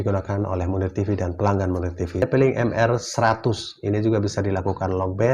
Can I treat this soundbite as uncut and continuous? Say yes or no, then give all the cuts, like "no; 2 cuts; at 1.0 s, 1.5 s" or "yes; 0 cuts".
no; 1 cut; at 2.2 s